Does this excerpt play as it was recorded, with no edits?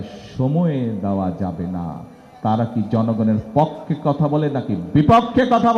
yes; 0 cuts

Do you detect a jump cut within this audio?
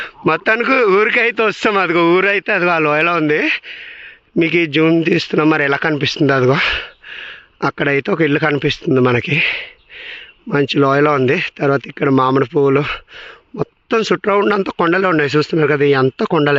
no; 0 cuts

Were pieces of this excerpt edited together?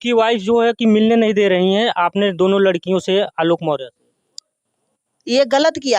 no; 0 cuts

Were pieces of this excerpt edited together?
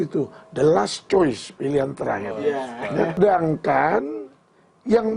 yes; 1 cut; at 3.2 s

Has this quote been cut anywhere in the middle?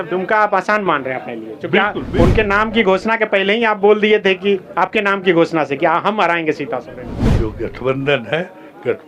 yes; 1 cut; at 7.3 s

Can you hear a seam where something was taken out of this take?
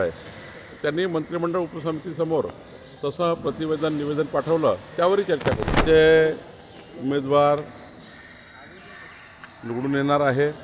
yes; 1 cut; at 5.8 s

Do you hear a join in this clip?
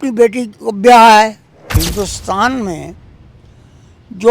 yes; 1 cut; at 1.8 s

